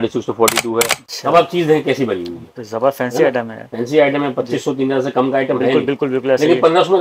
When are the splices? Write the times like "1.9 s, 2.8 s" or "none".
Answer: 1.0 s